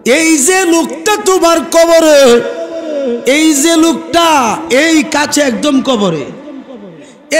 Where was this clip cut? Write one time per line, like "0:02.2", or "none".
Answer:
none